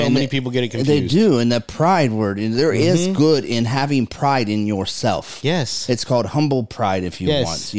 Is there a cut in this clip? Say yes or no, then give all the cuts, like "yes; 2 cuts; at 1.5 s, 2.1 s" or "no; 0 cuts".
no; 0 cuts